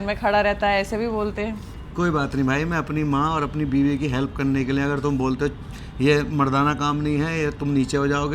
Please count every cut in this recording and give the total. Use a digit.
0